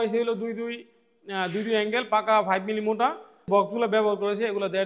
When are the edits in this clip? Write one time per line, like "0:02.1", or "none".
0:03.4